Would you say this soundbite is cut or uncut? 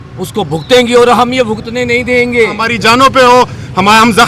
cut